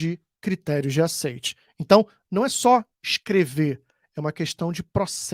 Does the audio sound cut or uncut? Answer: uncut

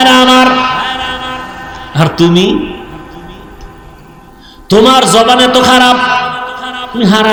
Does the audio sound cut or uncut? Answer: uncut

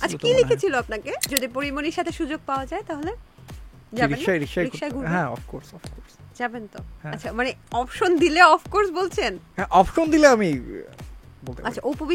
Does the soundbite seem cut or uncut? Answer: cut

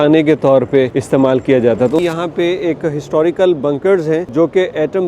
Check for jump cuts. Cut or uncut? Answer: cut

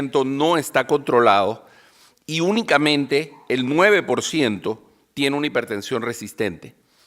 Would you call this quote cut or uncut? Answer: cut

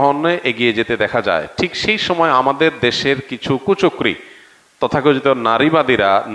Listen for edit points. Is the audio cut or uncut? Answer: uncut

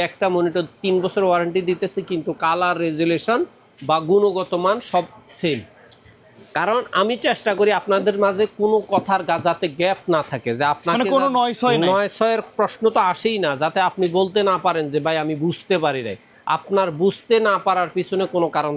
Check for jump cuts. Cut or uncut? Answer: uncut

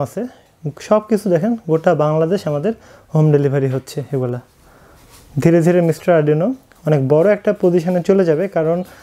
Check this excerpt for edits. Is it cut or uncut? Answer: uncut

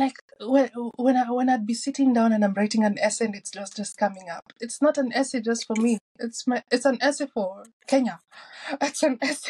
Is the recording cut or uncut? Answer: uncut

